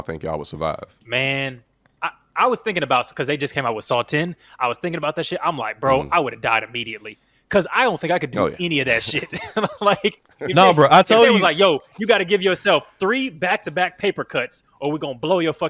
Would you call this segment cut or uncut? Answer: uncut